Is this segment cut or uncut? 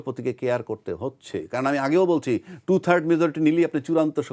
uncut